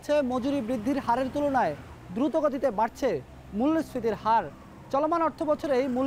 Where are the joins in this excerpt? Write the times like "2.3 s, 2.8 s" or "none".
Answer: none